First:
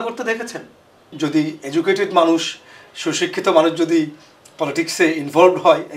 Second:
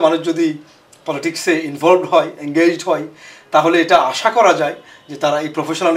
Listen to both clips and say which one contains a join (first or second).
first